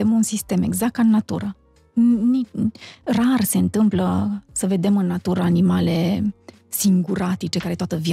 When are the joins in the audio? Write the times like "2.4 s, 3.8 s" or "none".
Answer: none

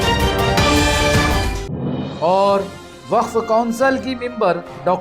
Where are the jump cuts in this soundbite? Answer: 2.1 s

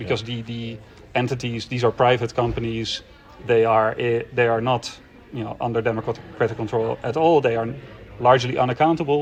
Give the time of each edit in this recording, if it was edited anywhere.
none

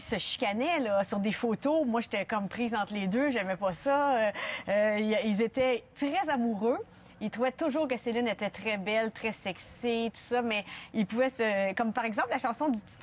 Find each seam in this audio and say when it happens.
2.6 s

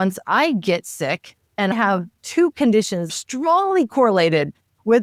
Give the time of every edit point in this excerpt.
1.7 s, 3.1 s

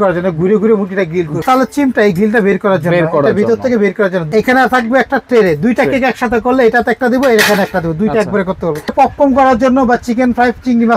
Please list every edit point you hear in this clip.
1.4 s, 4.3 s, 8.9 s

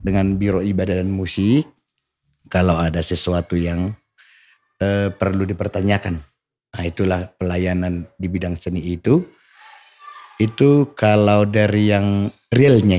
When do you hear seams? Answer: none

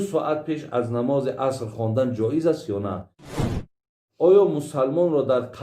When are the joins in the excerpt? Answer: 3.5 s

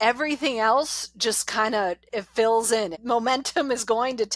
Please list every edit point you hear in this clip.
3.0 s

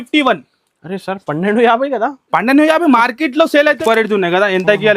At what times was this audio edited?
3.8 s

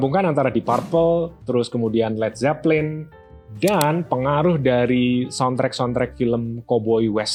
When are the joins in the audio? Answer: none

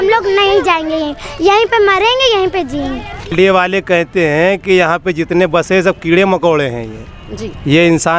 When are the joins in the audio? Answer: 3.1 s

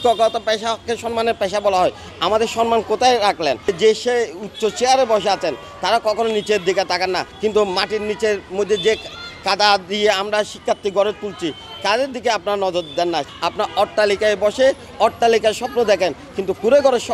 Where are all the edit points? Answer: 3.7 s, 7.3 s, 13.3 s

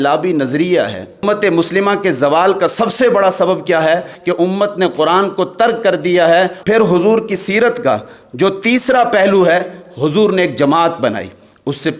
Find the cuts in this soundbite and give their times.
1.2 s, 4.1 s, 6.6 s

